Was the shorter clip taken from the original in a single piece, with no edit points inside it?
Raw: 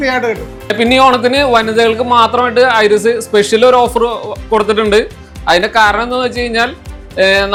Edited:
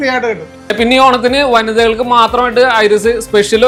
yes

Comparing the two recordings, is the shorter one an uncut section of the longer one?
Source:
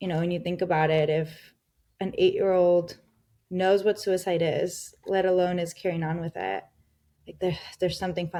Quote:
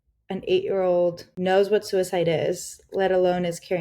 no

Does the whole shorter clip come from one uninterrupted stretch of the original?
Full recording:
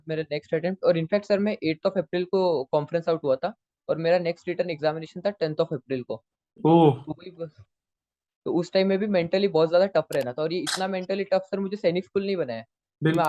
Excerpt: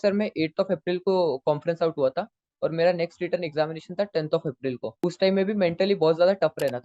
no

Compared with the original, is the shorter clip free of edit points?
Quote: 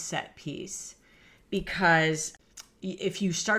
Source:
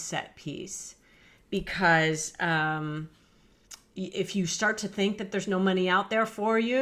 no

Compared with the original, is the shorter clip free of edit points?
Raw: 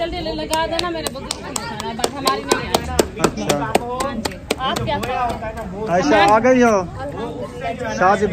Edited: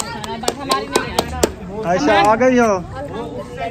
no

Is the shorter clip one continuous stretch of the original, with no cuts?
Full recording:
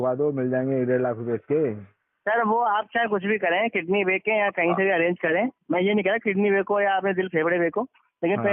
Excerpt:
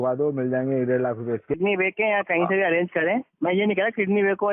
no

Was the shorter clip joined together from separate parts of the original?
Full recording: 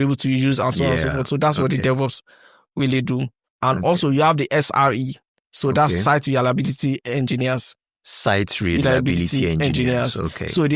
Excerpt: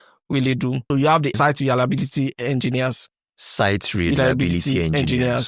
yes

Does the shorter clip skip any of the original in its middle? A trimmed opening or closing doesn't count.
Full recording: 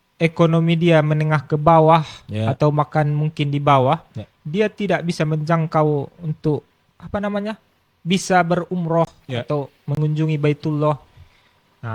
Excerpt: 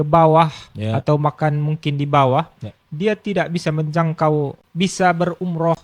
yes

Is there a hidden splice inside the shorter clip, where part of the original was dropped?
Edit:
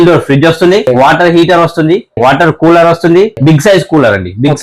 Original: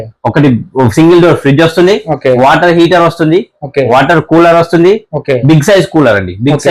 yes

